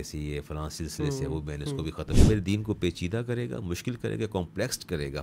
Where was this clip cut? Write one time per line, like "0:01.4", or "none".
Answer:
0:02.1